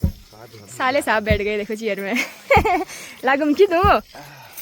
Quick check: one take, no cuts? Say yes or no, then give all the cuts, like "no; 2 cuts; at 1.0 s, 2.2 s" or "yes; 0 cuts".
yes; 0 cuts